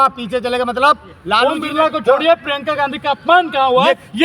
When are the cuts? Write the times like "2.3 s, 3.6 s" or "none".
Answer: 1.4 s